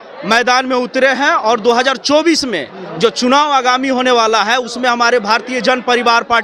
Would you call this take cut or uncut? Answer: uncut